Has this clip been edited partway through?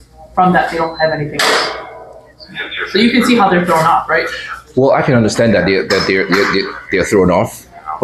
no; 0 cuts

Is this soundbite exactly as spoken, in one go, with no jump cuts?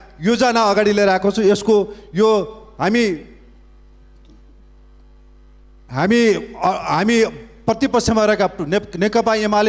yes; 0 cuts

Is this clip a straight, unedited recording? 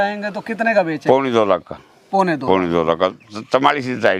yes; 0 cuts

